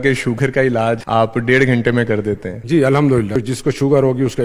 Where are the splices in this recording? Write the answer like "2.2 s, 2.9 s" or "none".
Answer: 1.0 s, 2.5 s, 3.4 s